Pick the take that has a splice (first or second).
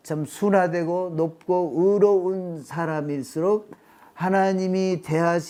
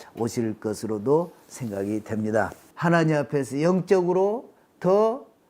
second